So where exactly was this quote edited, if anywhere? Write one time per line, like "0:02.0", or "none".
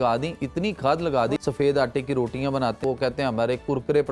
0:01.4
0:02.8